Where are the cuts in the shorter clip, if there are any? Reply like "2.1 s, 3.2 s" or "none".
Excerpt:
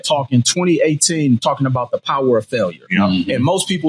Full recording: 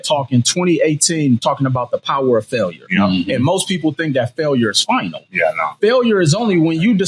none

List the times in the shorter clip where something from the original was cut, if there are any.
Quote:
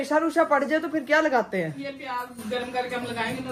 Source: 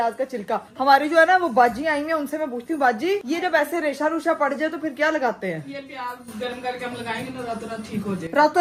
none

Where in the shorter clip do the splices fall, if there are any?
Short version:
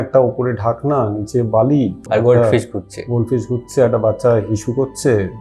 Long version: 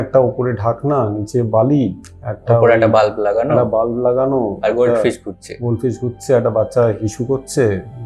2.0 s

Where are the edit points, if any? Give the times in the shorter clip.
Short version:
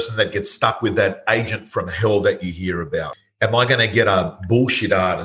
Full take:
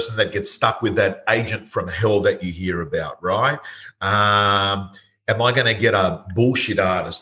3.1 s

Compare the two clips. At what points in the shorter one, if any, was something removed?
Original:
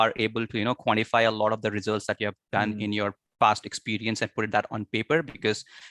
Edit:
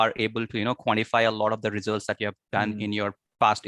none

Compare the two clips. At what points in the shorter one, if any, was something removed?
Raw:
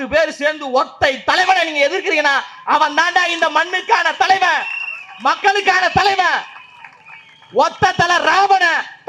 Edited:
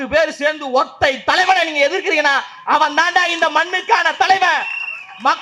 none

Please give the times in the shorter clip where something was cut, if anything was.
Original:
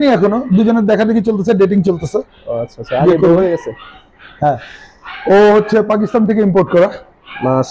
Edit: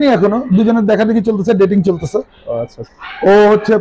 2.8 s

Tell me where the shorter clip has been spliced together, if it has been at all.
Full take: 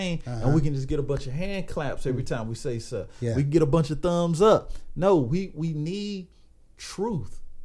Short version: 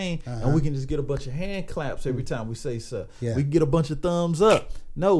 none

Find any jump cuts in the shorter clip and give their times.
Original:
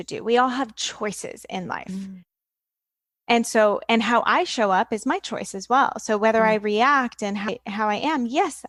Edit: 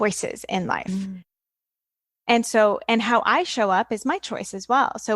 none

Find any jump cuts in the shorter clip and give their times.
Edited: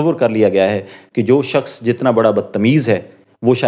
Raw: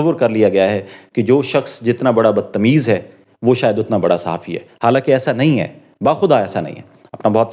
none

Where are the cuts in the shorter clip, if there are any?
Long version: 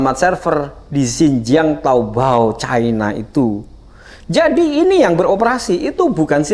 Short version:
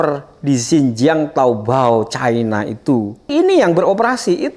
3.3 s

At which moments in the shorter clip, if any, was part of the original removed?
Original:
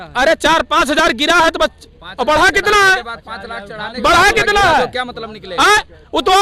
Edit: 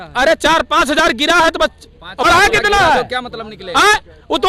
2.2 s

